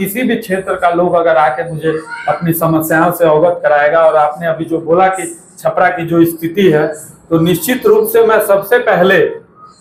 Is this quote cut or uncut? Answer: uncut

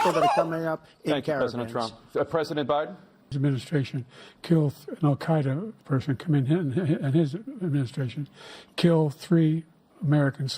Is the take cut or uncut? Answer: cut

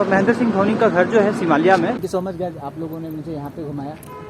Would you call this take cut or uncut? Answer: cut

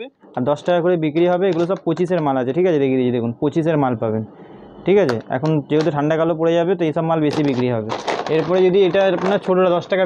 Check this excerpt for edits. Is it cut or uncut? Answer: uncut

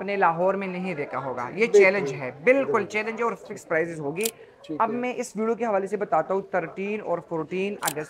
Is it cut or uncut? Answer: uncut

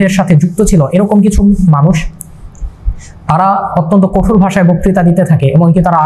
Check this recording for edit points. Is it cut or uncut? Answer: uncut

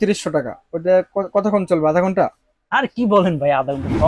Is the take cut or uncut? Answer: uncut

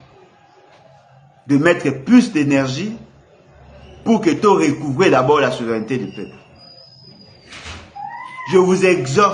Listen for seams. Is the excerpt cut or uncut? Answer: uncut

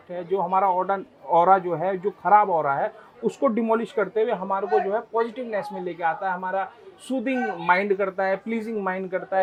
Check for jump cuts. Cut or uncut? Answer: uncut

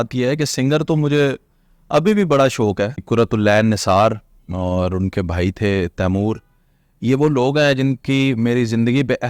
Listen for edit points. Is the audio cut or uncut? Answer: cut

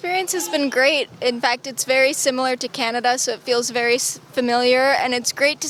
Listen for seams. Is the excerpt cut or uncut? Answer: uncut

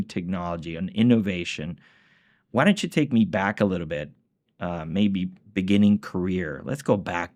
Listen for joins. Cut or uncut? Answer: uncut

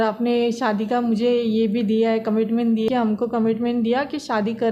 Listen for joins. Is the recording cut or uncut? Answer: cut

